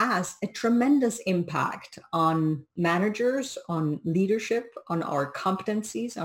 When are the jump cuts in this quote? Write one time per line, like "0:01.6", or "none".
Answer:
0:02.7